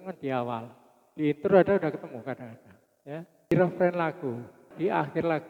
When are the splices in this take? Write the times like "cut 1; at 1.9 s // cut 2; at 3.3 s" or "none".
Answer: cut 1; at 3.5 s // cut 2; at 4.7 s